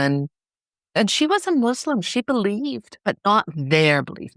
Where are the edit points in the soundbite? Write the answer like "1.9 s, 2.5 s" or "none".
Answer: 1.0 s, 2.9 s